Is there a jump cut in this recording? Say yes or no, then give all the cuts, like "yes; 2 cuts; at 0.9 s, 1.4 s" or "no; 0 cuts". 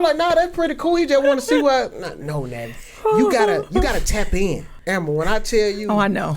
yes; 1 cut; at 4.7 s